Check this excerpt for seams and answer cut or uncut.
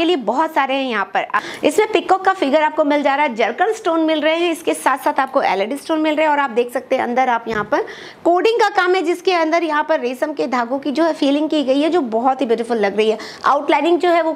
cut